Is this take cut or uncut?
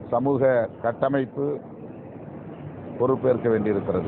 uncut